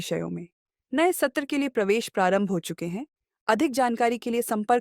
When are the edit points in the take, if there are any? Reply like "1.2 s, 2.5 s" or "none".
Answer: none